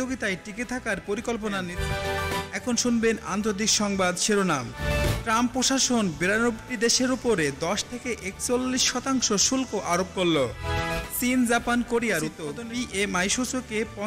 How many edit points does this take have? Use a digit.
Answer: 2